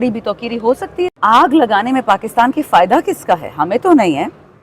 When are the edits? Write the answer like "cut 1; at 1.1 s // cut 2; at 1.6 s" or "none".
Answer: cut 1; at 1.2 s